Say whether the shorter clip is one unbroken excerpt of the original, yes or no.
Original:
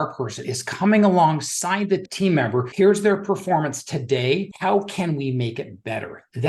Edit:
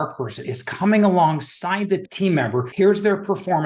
yes